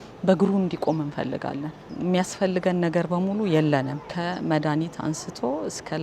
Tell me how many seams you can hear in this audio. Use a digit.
2